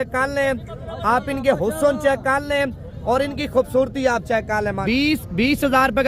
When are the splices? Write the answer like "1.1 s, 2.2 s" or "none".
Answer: 4.8 s